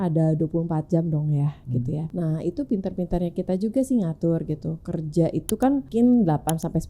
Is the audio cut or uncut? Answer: cut